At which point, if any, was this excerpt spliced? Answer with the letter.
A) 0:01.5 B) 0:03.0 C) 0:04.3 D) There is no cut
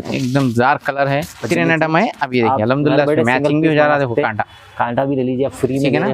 A